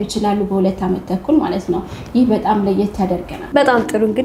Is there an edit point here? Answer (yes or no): no